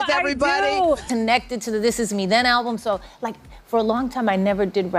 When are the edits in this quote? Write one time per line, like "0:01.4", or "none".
0:01.0